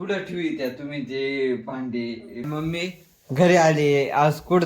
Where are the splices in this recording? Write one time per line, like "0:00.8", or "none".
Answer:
0:02.4